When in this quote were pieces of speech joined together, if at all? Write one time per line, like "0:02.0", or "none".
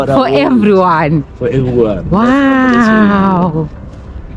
none

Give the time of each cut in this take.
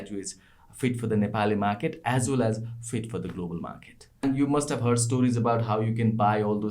0:04.2

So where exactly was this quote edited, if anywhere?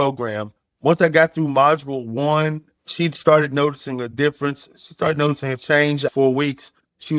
0:02.7
0:06.0

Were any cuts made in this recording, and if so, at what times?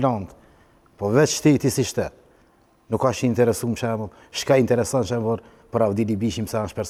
none

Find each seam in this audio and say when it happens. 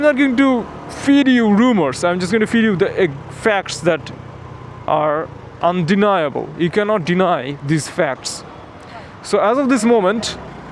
none

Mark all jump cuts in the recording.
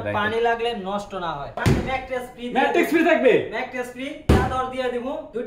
0:01.6

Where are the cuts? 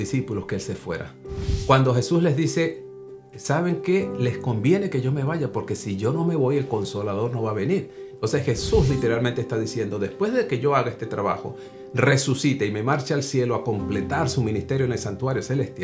0:01.6
0:08.0

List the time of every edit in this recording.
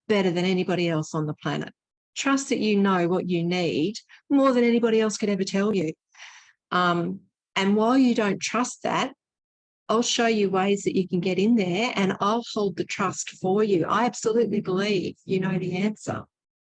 none

